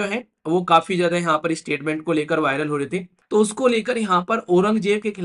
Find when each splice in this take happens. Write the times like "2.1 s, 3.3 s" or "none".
3.1 s